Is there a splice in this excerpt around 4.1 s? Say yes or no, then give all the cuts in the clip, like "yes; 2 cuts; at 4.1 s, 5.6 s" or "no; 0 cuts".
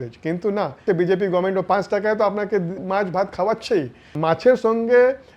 yes; 2 cuts; at 0.8 s, 4.1 s